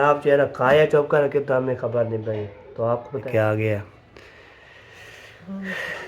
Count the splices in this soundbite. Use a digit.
1